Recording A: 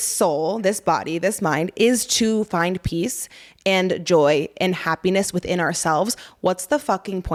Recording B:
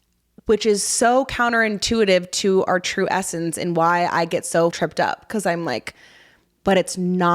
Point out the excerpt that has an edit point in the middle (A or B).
B